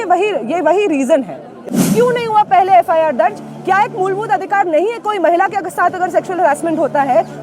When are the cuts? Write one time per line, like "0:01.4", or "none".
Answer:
0:01.6